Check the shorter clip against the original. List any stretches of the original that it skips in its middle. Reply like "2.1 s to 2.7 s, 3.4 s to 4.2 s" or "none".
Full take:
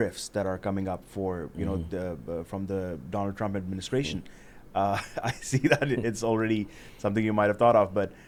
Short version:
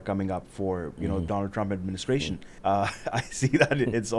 1.8 s to 3.1 s, 4.3 s to 4.5 s